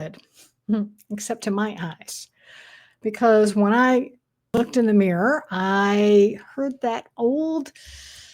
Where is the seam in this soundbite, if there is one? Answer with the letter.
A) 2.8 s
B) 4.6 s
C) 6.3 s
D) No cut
B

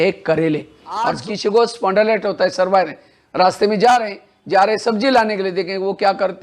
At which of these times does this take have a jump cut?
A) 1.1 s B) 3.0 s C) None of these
A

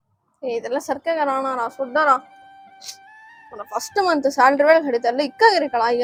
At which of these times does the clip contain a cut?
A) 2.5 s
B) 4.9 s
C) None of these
C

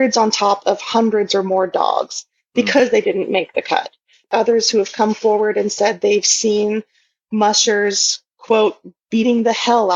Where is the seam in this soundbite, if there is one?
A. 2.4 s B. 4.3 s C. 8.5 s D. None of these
B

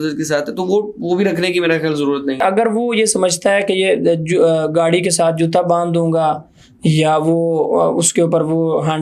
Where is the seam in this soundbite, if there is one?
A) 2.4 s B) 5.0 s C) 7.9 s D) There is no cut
A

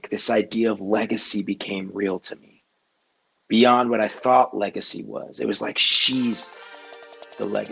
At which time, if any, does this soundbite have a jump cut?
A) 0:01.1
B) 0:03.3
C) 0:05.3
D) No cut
D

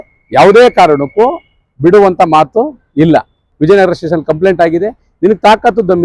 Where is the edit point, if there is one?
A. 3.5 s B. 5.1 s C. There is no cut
A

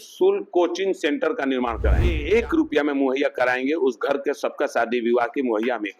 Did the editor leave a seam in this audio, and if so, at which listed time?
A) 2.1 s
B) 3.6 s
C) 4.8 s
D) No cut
A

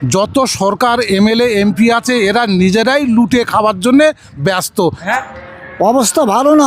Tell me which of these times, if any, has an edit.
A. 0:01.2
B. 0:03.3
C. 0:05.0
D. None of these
C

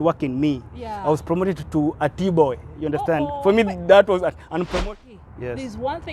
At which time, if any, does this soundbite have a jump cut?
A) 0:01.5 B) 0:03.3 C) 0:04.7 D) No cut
C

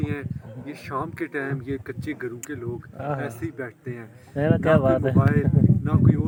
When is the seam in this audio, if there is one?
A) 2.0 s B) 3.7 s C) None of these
C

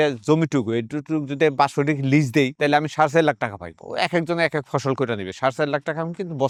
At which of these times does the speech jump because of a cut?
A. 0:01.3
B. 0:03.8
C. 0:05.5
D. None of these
D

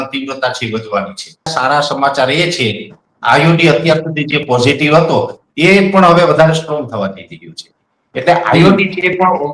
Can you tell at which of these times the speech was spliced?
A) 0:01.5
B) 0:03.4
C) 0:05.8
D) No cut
A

